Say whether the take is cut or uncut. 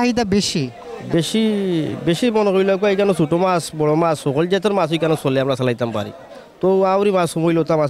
uncut